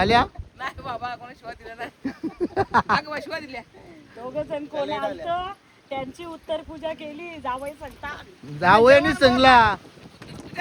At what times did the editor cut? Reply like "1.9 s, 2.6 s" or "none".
none